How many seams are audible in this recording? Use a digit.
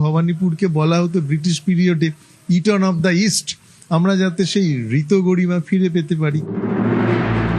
0